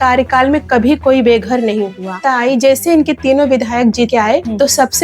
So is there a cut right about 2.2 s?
yes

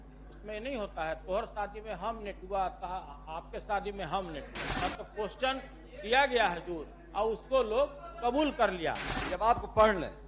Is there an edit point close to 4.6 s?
yes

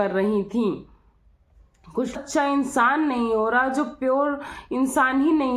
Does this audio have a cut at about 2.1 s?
yes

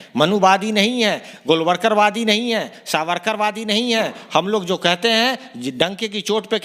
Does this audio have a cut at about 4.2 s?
no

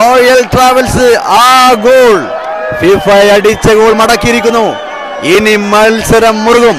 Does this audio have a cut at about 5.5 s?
no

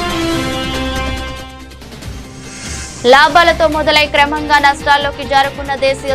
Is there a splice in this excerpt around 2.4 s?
yes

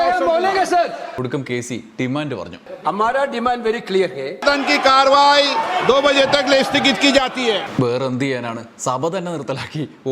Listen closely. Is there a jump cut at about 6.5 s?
no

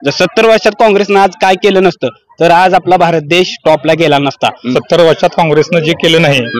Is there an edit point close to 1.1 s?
no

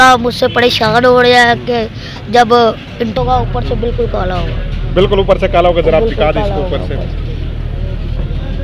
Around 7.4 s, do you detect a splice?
no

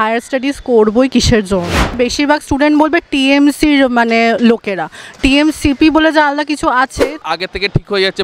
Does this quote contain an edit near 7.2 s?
yes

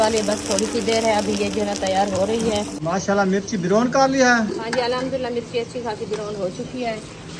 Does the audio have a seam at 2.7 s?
yes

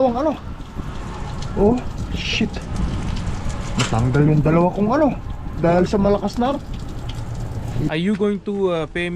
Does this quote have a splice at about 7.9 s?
yes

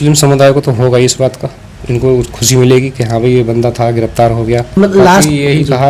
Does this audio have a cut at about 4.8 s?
yes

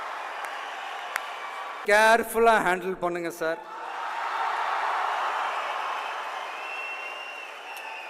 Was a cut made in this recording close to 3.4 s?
no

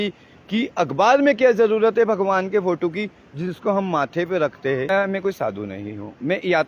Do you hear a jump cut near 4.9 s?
yes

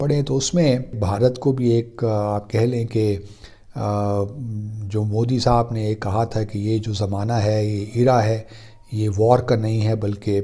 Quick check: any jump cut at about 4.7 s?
no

